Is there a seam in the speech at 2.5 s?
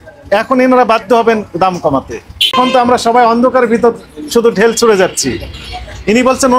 yes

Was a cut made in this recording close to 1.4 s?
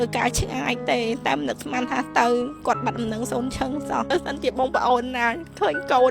no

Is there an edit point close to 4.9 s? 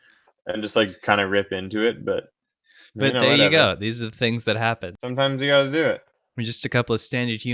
yes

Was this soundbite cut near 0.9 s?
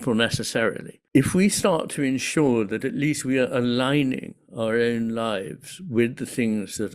yes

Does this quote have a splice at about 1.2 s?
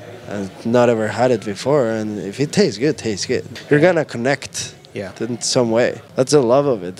no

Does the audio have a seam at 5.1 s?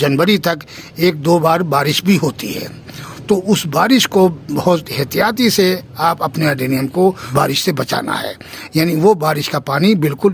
no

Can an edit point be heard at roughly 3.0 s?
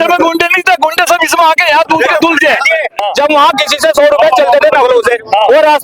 yes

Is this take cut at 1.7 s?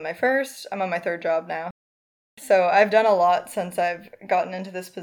yes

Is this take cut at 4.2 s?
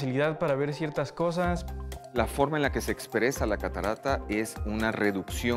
no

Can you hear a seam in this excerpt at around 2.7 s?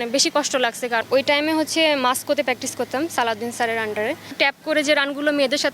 no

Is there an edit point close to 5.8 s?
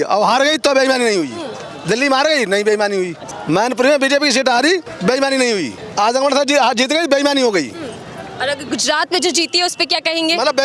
yes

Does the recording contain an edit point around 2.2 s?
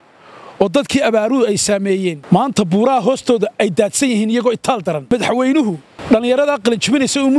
yes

